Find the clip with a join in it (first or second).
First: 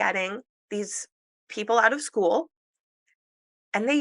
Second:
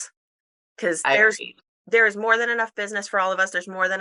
first